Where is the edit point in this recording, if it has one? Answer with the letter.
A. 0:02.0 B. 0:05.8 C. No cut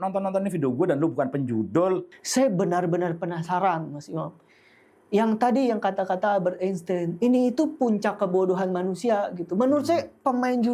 A